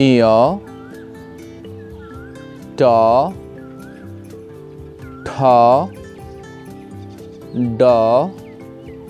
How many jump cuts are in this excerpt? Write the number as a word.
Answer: two